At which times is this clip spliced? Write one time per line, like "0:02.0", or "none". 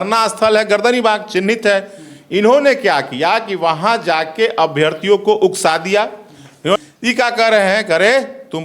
0:06.8